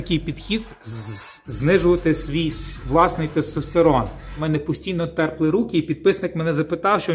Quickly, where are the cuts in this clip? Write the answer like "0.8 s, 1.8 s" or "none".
4.4 s